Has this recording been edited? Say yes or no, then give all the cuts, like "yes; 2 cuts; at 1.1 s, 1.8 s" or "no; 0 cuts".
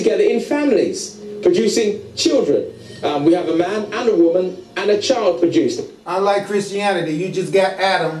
no; 0 cuts